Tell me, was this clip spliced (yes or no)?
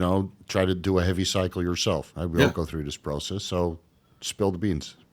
yes